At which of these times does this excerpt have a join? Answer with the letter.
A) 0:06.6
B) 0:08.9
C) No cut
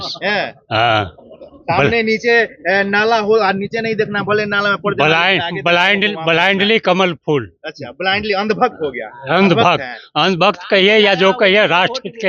C